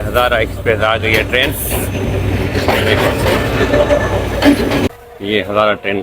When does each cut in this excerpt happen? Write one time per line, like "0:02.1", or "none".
0:04.9